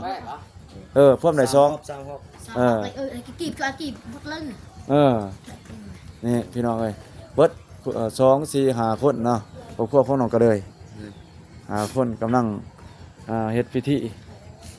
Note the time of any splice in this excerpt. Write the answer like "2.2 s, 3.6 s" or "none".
none

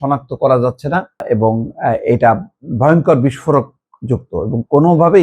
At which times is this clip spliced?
1.2 s

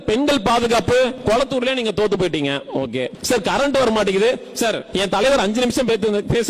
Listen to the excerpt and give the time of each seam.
1.2 s, 3.2 s, 4.8 s

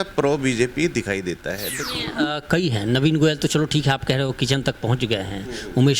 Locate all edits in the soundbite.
1.8 s

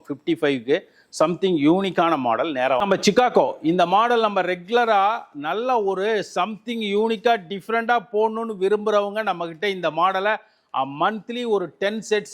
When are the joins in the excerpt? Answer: 2.8 s

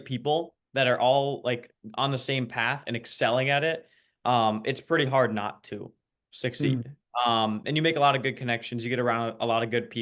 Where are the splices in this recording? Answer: none

